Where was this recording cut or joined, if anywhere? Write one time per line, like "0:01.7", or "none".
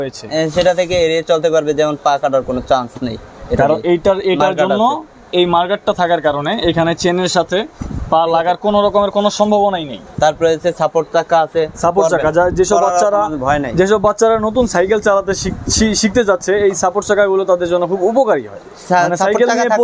none